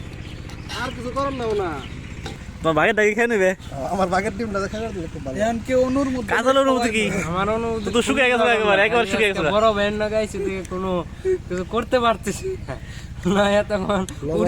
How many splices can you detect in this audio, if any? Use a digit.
1